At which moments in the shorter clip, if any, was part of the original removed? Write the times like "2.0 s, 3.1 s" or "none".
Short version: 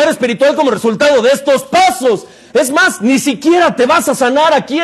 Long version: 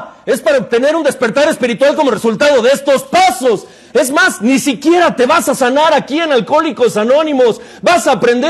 none